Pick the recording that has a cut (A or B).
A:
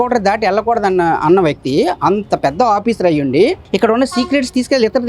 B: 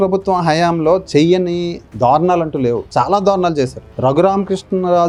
A